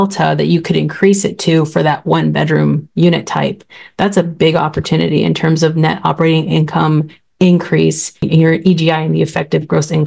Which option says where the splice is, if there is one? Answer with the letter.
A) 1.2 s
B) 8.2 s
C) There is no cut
B